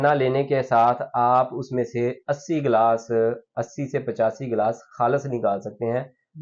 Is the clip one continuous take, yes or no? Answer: yes